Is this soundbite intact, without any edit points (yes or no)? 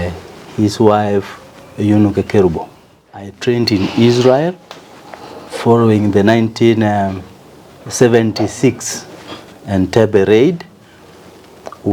no